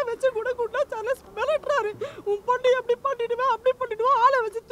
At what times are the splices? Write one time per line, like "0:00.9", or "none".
none